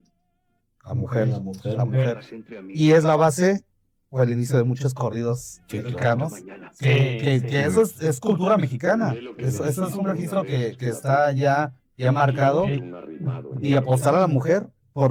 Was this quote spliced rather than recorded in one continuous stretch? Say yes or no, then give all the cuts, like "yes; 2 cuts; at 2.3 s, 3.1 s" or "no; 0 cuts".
no; 0 cuts